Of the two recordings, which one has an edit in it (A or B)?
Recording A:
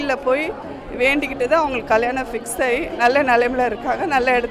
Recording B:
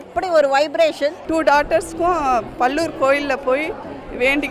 B